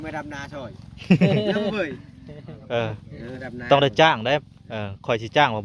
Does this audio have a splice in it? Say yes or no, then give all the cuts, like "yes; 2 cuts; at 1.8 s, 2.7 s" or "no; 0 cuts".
yes; 1 cut; at 3.4 s